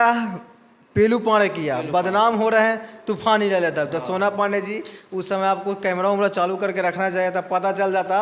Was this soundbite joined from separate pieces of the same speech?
no; 0 cuts

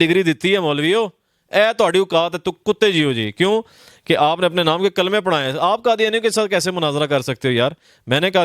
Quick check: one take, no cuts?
yes; 0 cuts

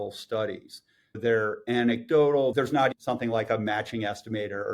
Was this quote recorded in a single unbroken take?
no; 2 cuts; at 1.2 s, 2.7 s

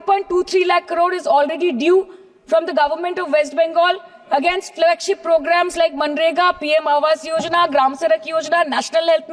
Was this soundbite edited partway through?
no; 0 cuts

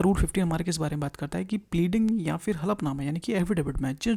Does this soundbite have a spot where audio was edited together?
no; 0 cuts

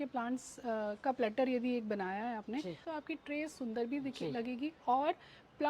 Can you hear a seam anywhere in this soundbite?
yes; 1 cut; at 2.8 s

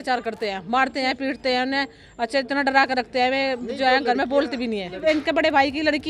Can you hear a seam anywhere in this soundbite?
yes; 1 cut; at 5.0 s

